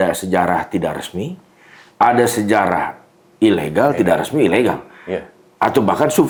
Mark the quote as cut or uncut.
uncut